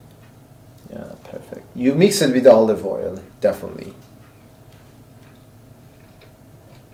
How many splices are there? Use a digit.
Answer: 0